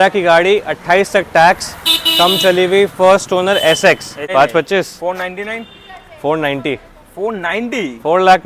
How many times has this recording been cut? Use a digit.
1